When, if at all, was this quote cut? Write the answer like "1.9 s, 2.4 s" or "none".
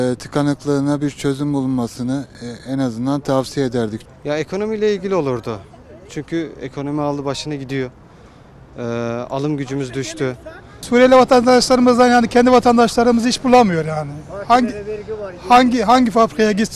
4.0 s, 10.8 s